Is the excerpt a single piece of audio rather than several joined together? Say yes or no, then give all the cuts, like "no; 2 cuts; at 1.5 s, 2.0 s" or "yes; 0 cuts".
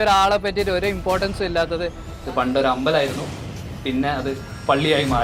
no; 1 cut; at 2.1 s